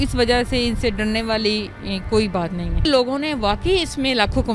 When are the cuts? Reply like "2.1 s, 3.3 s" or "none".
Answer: 2.8 s